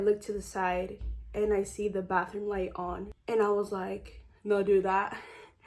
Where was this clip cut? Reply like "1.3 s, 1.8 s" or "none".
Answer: 3.1 s